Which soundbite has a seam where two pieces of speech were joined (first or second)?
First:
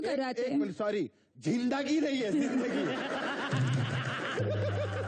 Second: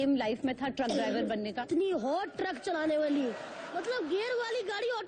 second